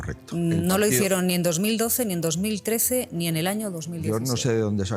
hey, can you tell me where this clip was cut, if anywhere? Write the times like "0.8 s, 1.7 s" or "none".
none